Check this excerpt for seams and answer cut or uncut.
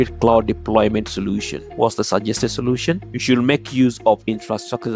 cut